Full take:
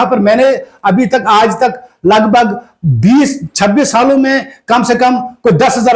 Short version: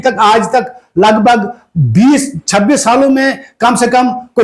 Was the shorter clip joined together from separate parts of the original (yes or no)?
no